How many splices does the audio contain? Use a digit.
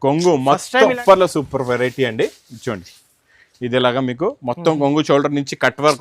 1